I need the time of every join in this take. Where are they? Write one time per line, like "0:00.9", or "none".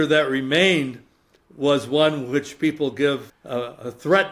0:03.3